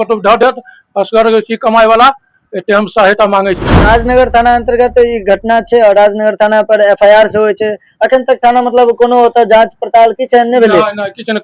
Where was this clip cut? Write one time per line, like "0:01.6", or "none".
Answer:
0:03.8